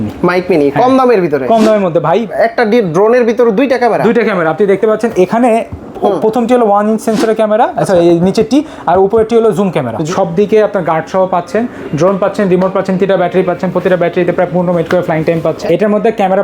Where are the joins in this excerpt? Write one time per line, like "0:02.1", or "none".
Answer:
0:02.3
0:10.1
0:15.6